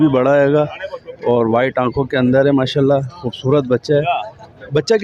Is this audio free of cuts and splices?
yes; 0 cuts

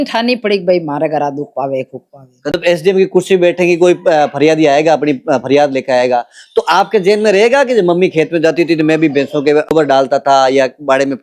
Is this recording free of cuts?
no; 2 cuts; at 2.5 s, 9.7 s

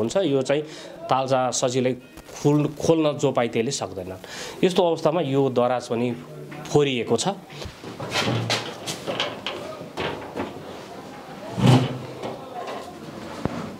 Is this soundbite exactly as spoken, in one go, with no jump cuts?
no; 1 cut; at 7.5 s

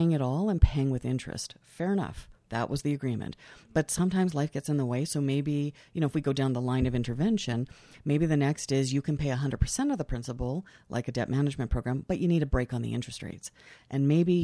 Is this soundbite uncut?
yes; 0 cuts

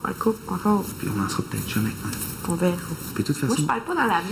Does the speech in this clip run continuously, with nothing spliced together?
no; 1 cut; at 0.9 s

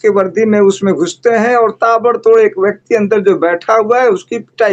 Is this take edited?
no; 0 cuts

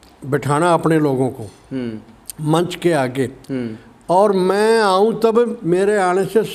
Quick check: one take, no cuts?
yes; 0 cuts

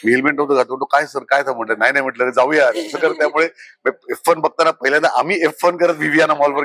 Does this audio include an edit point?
no; 0 cuts

